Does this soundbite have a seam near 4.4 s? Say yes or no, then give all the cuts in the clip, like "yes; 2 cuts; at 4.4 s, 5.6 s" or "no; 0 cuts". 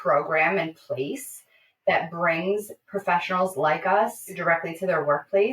yes; 1 cut; at 4.4 s